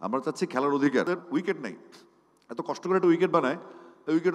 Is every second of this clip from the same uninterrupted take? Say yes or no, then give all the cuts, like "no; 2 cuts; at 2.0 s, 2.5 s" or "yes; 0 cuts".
no; 1 cut; at 1.1 s